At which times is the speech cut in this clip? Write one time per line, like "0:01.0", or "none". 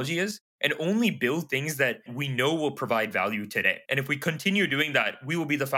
0:02.0
0:03.8